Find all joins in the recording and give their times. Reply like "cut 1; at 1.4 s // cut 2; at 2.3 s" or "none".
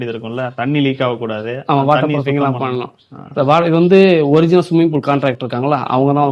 none